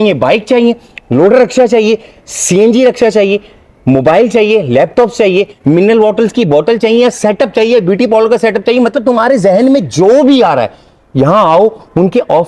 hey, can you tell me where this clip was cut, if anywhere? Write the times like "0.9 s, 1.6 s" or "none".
none